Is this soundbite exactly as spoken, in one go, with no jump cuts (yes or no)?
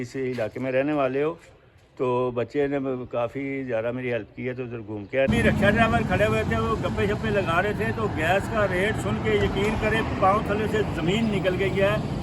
no